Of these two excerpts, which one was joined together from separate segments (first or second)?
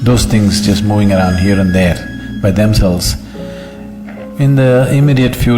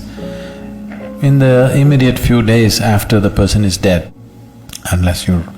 second